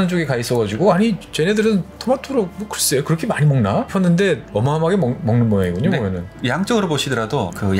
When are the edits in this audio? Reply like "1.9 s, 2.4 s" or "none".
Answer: 1.3 s, 3.9 s, 4.5 s